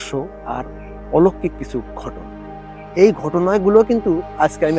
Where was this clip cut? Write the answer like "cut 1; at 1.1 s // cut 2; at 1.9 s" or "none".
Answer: none